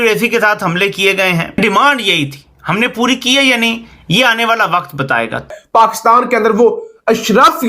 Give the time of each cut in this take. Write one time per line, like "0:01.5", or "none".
0:01.6
0:05.5